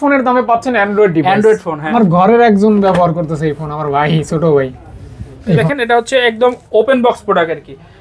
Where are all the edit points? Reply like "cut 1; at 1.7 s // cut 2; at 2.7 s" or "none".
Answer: cut 1; at 1.8 s // cut 2; at 5.6 s